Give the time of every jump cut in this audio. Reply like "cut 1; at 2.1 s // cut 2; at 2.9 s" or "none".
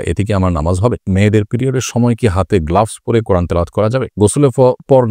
cut 1; at 1.1 s // cut 2; at 4.2 s